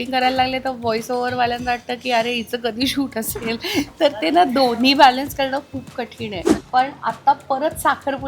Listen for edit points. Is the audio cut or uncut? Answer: cut